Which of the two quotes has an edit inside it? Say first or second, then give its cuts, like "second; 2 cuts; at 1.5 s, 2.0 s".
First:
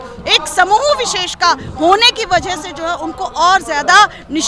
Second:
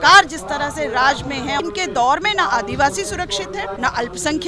second; 2 cuts; at 1.6 s, 3.7 s